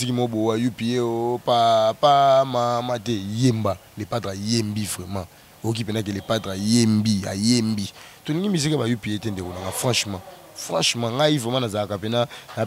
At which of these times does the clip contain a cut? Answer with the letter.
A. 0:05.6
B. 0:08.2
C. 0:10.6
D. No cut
D